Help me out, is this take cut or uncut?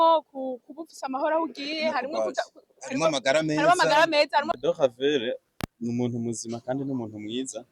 cut